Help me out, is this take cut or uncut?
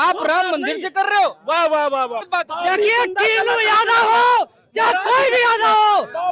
cut